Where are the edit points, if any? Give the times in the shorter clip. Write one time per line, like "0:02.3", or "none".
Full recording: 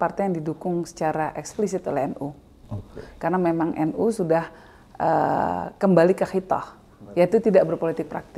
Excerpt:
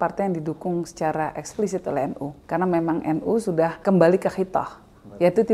0:02.3
0:03.8